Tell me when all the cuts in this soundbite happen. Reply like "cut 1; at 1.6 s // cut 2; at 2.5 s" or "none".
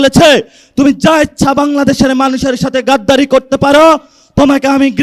none